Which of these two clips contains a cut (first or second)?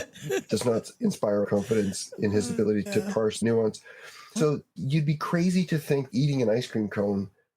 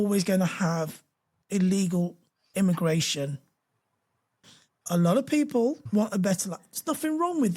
first